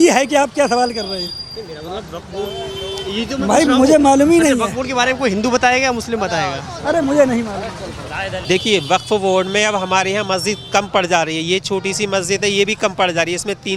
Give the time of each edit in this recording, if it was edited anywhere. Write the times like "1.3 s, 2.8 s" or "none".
8.3 s